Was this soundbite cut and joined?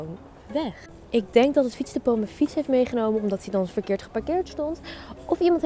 no; 0 cuts

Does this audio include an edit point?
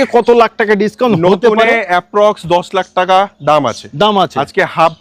no; 0 cuts

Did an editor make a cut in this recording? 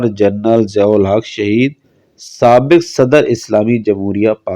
no; 0 cuts

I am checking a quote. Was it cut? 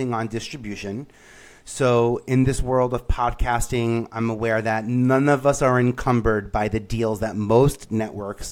no; 0 cuts

